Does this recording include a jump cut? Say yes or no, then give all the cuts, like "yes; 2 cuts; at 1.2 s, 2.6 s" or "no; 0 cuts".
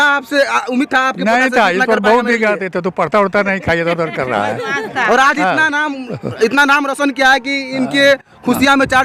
no; 0 cuts